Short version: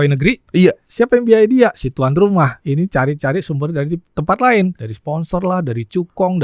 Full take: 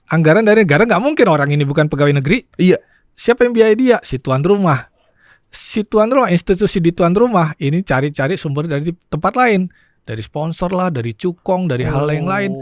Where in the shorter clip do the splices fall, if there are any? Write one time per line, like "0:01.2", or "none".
0:00.8
0:02.6
0:04.9